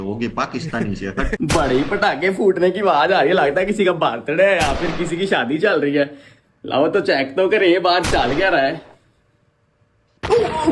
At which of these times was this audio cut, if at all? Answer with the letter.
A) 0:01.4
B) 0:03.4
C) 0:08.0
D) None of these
A